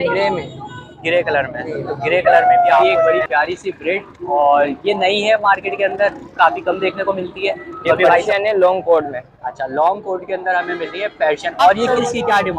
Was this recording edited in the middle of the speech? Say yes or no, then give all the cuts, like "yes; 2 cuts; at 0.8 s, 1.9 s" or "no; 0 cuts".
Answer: yes; 3 cuts; at 3.2 s, 8.2 s, 11.9 s